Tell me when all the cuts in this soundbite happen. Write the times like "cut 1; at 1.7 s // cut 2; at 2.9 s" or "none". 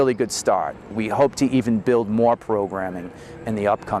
cut 1; at 0.9 s

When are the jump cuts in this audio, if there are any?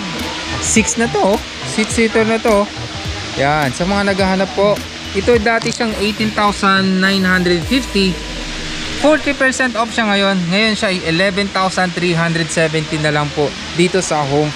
none

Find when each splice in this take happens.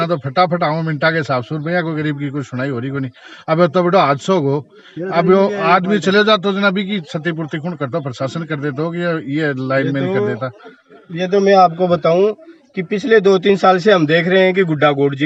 none

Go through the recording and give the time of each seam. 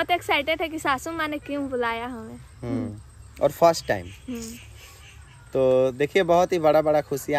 none

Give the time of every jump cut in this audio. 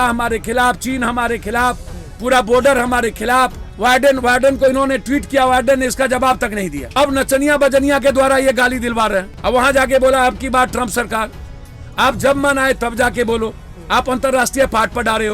cut 1; at 3.6 s // cut 2; at 6.9 s // cut 3; at 9.3 s

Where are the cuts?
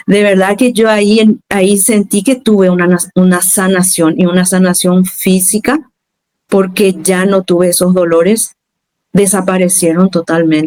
none

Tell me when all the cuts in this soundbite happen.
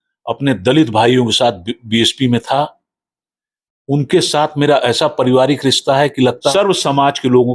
cut 1; at 6.5 s

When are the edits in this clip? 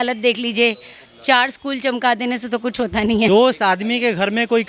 cut 1; at 3.3 s

